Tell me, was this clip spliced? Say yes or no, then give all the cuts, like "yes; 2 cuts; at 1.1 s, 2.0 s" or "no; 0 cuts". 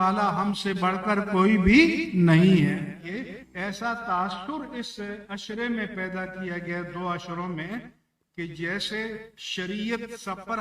yes; 1 cut; at 3.1 s